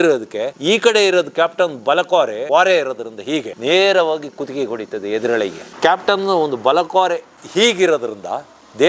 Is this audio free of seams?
no; 1 cut; at 5.7 s

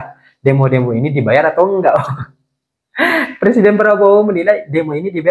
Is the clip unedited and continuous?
yes; 0 cuts

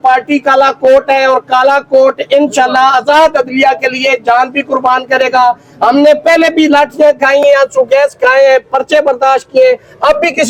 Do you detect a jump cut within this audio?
no; 0 cuts

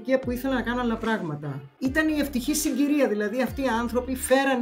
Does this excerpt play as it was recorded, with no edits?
no; 1 cut; at 1.7 s

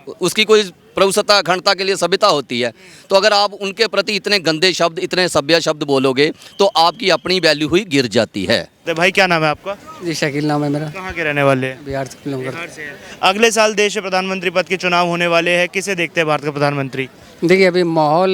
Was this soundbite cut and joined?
yes; 1 cut; at 8.7 s

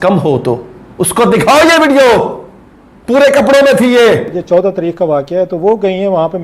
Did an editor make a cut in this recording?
yes; 1 cut; at 4.3 s

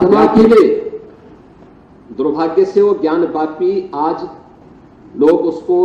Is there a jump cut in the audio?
no; 0 cuts

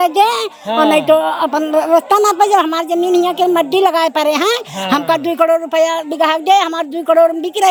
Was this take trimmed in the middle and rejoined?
no; 0 cuts

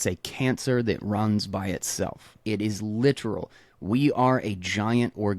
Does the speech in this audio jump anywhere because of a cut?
yes; 1 cut; at 2.3 s

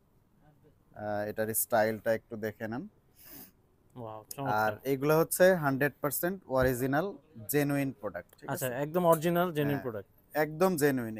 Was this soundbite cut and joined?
no; 0 cuts

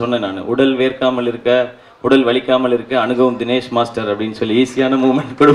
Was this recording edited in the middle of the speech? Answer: no; 0 cuts

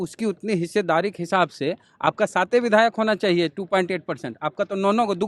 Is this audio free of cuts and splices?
yes; 0 cuts

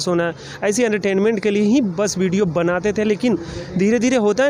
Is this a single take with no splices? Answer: yes; 0 cuts

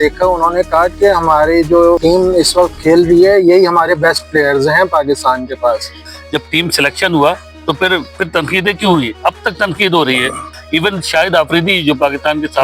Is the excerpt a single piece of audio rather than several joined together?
no; 3 cuts; at 2.0 s, 6.1 s, 10.5 s

